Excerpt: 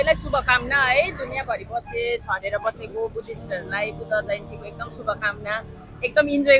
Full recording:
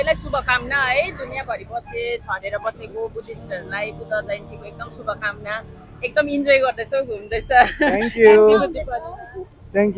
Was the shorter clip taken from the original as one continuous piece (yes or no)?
yes